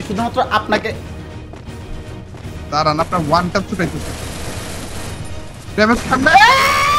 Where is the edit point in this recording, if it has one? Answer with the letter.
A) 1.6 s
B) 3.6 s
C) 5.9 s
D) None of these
D